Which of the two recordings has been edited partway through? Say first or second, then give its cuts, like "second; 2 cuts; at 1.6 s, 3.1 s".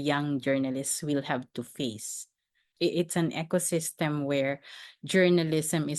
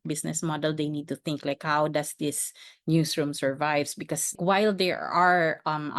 second; 1 cut; at 4.3 s